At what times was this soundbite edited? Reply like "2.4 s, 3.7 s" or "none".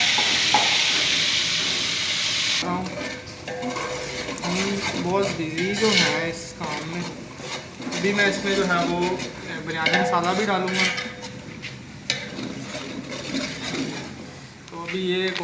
2.6 s